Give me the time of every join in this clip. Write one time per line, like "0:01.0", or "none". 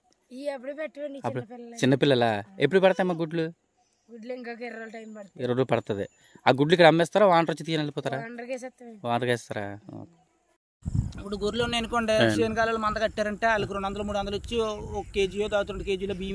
0:10.6